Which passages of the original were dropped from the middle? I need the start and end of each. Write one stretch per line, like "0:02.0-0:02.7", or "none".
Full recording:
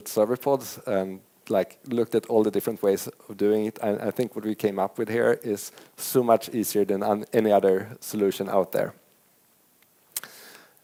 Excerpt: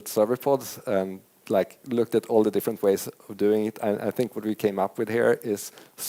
none